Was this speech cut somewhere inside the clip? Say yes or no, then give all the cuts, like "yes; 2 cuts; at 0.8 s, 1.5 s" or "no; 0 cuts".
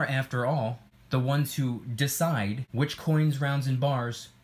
yes; 2 cuts; at 0.9 s, 2.6 s